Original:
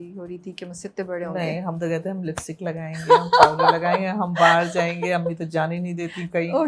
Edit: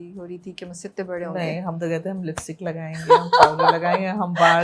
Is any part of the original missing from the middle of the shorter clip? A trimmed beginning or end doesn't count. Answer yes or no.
no